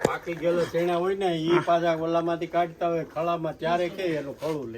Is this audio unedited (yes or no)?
yes